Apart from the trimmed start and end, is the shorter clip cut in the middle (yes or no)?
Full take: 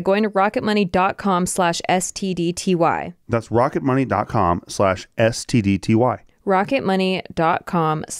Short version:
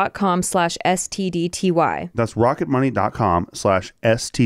yes